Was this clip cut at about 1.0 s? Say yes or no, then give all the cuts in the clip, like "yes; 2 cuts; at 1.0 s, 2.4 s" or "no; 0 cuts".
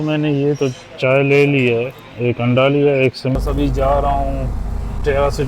no; 1 cut; at 3.4 s